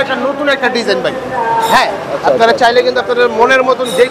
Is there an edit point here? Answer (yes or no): no